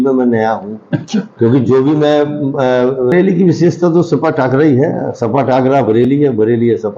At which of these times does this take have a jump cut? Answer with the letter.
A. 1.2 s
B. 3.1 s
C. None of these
B